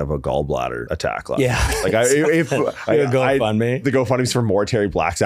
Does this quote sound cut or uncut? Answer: cut